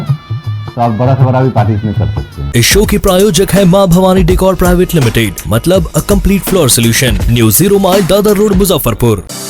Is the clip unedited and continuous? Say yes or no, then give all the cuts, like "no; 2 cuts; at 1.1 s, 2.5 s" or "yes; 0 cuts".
yes; 0 cuts